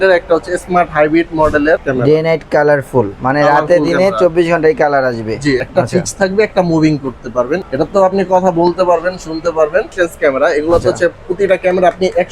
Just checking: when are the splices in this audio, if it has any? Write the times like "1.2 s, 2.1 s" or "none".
1.9 s, 5.6 s, 7.7 s, 9.9 s